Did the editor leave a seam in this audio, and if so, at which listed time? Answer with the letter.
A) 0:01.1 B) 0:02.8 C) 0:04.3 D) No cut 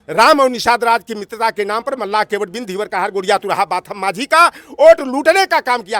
D